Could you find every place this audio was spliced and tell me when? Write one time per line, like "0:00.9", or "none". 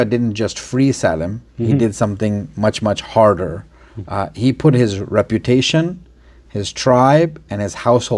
none